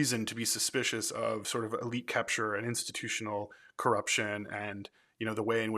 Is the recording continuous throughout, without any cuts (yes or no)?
no